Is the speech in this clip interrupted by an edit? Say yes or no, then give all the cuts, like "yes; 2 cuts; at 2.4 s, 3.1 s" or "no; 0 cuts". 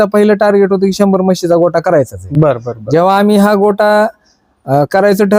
no; 0 cuts